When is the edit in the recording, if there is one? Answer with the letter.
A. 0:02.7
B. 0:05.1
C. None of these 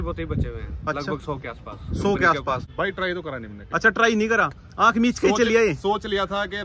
A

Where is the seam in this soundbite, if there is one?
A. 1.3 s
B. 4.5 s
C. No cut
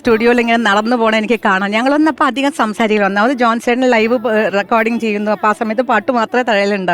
C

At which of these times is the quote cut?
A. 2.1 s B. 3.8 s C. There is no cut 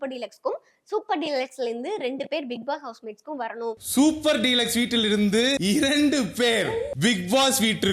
C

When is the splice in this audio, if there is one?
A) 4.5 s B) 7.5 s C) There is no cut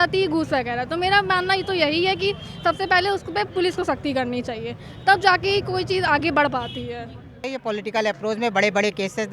B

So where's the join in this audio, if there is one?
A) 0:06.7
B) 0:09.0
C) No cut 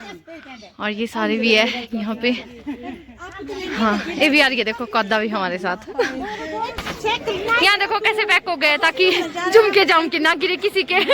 A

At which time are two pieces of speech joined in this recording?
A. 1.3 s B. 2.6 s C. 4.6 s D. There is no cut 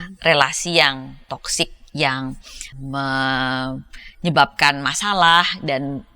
B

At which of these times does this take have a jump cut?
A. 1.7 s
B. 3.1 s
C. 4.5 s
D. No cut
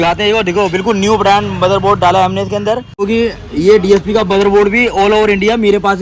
B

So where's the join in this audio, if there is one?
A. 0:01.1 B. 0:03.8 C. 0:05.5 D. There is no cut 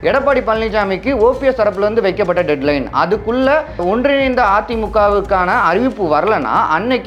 B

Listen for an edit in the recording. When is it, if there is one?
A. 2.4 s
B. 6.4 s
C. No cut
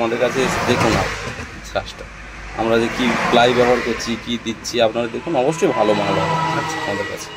C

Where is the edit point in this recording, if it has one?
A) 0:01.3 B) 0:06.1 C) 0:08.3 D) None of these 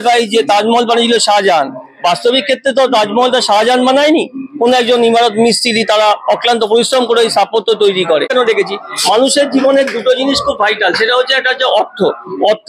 C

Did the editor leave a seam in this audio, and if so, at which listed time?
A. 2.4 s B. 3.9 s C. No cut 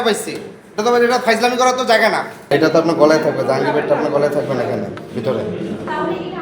A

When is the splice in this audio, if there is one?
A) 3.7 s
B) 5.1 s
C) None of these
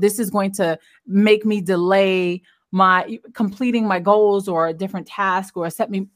C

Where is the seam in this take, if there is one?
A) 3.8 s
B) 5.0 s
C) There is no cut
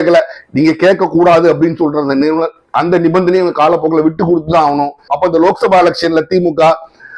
B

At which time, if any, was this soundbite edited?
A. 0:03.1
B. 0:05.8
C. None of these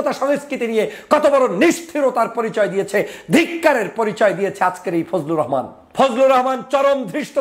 B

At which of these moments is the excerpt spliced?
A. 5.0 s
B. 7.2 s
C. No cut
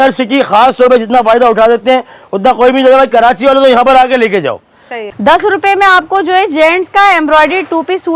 A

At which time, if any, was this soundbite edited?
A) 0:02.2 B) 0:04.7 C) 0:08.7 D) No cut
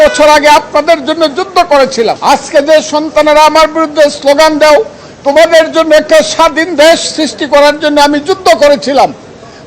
A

